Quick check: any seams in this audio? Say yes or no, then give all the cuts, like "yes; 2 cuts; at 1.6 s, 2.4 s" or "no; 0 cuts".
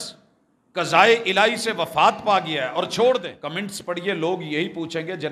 yes; 1 cut; at 3.4 s